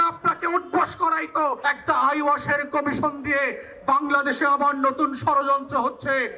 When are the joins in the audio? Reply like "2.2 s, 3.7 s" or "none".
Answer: 1.6 s